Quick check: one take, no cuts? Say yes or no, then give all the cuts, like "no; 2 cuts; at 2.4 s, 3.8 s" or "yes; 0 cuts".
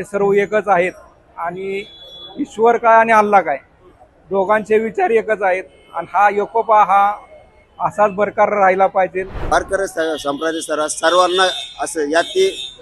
no; 1 cut; at 9.4 s